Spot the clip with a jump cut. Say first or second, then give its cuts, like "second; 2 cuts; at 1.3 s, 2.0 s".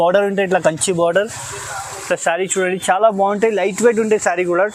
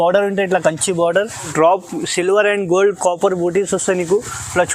second; 1 cut; at 1.5 s